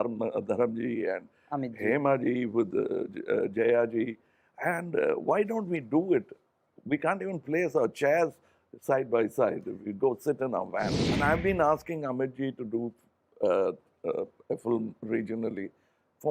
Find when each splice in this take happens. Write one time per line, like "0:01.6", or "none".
0:11.0